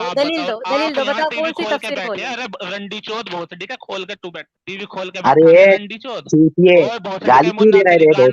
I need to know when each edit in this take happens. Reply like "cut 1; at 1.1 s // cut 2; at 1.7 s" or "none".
cut 1; at 4.5 s